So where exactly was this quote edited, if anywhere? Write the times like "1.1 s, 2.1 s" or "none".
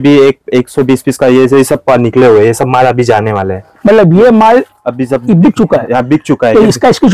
none